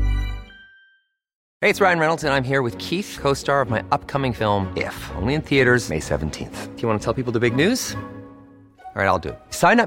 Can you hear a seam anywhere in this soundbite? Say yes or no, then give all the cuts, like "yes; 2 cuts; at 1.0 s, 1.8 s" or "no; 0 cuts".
yes; 1 cut; at 1.4 s